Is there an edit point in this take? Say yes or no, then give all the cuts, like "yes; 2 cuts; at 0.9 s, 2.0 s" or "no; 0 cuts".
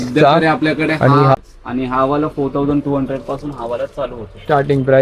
yes; 1 cut; at 1.3 s